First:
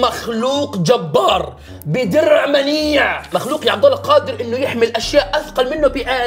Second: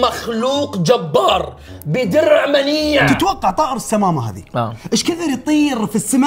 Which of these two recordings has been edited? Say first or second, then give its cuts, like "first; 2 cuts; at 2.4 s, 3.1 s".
second; 1 cut; at 3.0 s